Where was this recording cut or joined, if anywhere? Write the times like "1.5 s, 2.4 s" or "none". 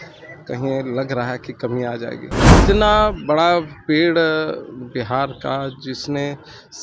2.6 s